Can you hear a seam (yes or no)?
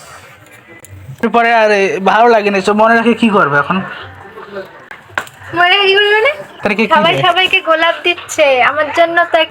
yes